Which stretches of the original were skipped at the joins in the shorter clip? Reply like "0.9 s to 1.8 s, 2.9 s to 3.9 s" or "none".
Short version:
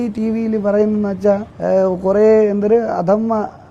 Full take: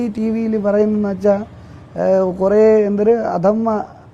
1.5 s to 1.9 s